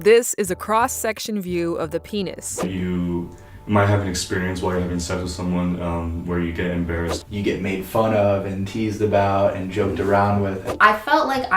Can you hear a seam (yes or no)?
yes